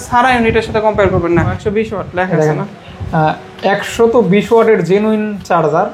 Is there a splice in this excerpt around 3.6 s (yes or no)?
no